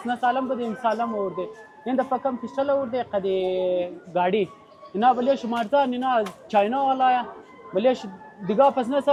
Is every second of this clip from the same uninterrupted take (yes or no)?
yes